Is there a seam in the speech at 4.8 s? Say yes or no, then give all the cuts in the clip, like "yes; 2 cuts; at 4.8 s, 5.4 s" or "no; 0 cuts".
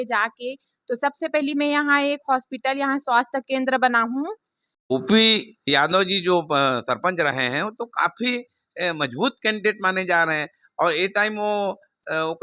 yes; 1 cut; at 4.8 s